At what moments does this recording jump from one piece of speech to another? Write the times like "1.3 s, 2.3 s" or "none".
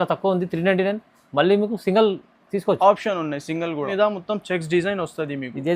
3.9 s